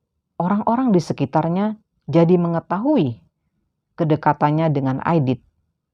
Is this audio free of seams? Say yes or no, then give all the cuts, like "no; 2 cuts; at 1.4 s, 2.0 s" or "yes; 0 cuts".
yes; 0 cuts